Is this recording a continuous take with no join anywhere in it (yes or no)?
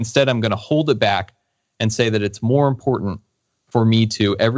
yes